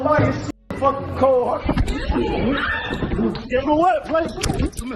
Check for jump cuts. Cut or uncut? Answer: uncut